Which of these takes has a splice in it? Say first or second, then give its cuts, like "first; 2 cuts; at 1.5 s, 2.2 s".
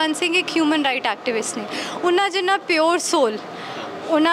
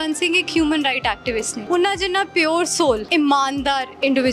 second; 2 cuts; at 1.6 s, 3.1 s